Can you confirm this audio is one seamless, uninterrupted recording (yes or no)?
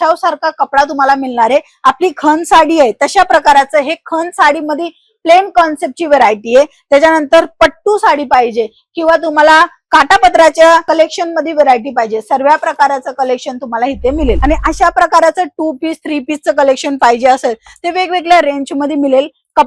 no